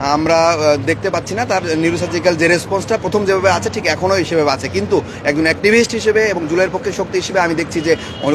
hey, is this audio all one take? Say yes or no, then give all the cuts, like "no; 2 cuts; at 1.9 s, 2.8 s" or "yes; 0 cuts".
yes; 0 cuts